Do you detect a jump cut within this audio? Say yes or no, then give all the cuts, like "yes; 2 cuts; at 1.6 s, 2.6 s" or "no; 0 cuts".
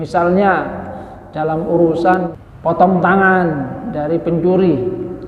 yes; 1 cut; at 2.4 s